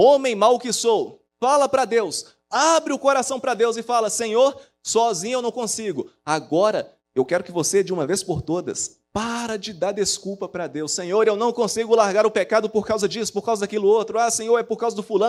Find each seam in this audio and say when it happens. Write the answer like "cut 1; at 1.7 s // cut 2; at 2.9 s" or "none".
cut 1; at 1.2 s // cut 2; at 7.0 s